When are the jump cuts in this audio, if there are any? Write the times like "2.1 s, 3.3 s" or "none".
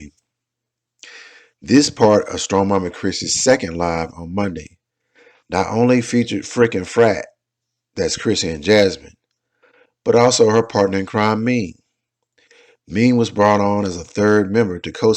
none